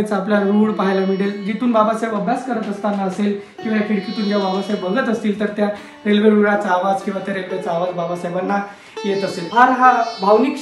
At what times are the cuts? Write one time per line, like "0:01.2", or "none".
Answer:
0:09.4